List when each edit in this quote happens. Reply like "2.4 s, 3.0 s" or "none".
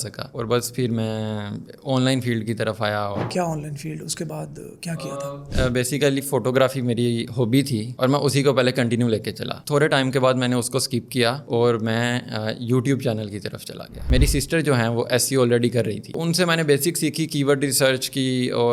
3.2 s, 14.1 s, 16.1 s